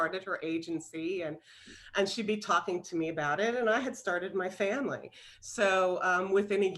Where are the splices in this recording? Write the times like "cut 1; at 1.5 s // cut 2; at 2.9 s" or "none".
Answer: none